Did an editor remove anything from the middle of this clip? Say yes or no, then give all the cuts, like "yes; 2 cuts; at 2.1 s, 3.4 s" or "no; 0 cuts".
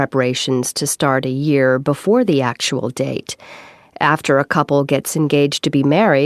yes; 1 cut; at 3.2 s